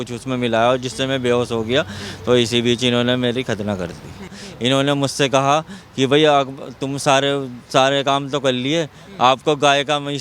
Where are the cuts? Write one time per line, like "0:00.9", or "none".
0:04.4